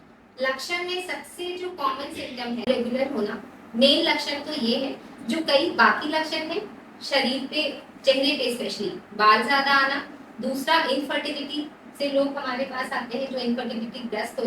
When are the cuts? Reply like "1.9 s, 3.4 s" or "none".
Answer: 2.7 s